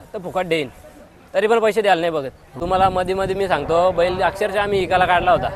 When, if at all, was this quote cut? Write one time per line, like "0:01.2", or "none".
0:02.6